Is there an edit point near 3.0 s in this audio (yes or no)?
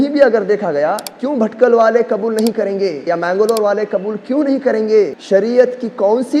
yes